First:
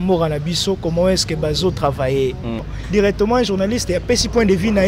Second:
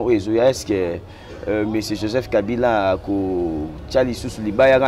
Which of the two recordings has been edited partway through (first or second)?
first